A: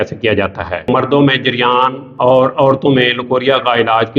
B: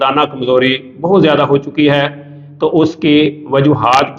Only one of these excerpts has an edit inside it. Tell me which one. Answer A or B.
A